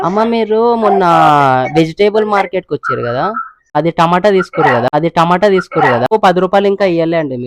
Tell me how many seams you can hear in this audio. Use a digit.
2